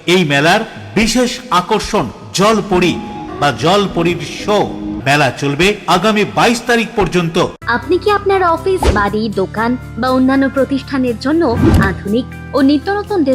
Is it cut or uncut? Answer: cut